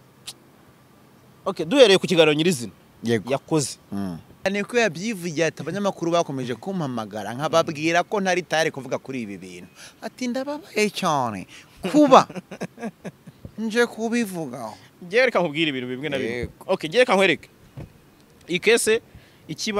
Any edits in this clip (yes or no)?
yes